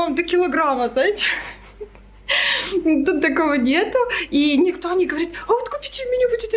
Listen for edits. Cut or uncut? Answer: uncut